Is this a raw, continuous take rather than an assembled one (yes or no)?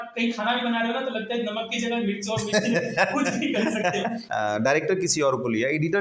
no